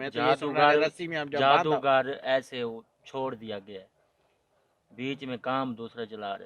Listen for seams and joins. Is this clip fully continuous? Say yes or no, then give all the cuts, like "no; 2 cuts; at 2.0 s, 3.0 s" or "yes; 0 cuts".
yes; 0 cuts